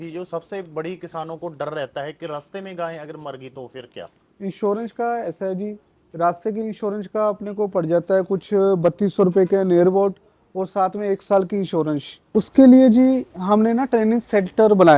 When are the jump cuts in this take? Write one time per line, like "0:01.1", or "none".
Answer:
0:12.2